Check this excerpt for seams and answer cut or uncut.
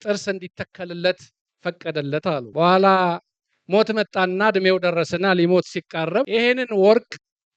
cut